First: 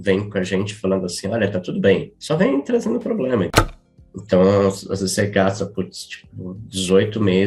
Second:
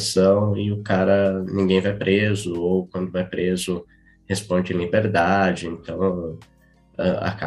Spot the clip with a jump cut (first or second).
first